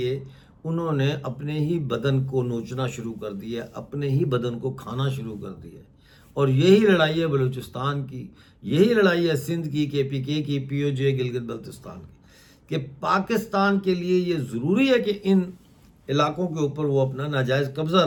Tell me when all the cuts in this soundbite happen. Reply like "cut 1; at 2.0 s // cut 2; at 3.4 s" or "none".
none